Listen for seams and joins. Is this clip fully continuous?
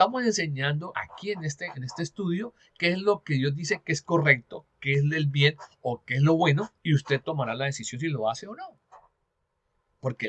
no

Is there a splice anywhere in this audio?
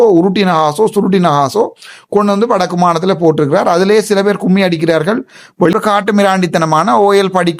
yes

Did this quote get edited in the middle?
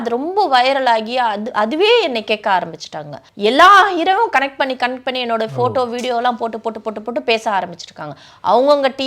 yes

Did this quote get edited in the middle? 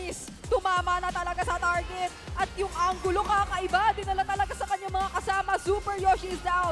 no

